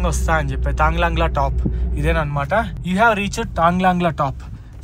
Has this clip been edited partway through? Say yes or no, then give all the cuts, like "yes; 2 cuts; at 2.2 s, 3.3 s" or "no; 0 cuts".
no; 0 cuts